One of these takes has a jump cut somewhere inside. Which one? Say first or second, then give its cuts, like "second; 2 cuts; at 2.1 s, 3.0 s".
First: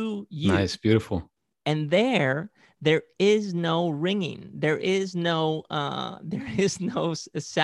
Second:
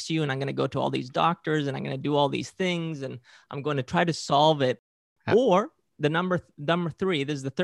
second; 1 cut; at 4.9 s